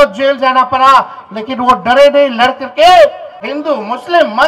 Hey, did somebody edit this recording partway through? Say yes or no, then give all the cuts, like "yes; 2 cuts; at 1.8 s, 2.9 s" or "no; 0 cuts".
yes; 1 cut; at 3.5 s